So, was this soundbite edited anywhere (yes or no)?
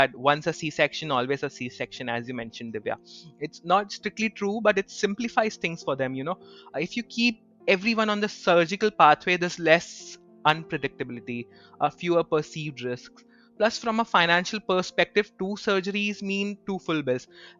no